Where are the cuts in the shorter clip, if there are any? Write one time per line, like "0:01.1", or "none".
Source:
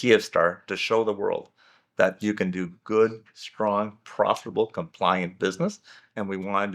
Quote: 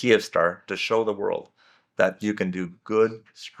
none